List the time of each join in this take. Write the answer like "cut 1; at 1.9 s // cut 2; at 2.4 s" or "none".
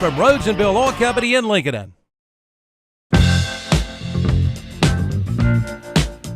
cut 1; at 3.9 s